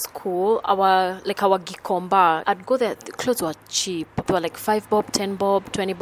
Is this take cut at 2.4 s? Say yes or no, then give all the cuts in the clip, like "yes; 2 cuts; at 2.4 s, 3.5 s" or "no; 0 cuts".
yes; 1 cut; at 2.4 s